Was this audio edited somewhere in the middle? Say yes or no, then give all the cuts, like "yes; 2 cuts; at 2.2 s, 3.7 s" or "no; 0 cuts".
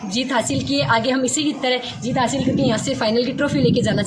no; 0 cuts